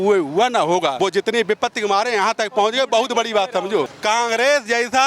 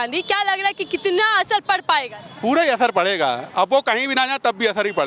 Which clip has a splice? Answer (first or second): first